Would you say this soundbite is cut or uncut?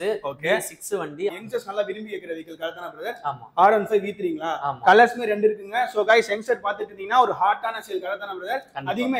cut